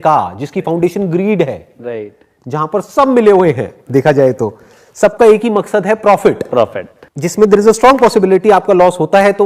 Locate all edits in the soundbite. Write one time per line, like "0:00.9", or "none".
0:06.6